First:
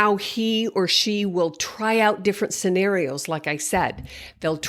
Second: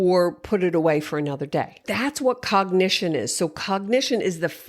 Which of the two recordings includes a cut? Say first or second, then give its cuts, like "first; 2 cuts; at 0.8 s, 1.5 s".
second; 1 cut; at 1.9 s